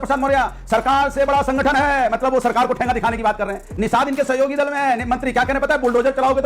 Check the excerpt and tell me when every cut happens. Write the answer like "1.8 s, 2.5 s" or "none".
none